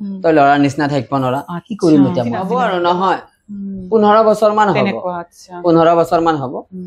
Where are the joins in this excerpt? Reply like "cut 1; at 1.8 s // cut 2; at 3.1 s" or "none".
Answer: cut 1; at 2.5 s